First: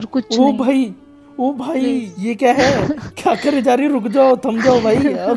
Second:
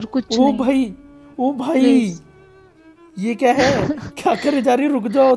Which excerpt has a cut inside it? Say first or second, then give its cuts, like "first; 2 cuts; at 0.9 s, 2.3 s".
first; 1 cut; at 2.1 s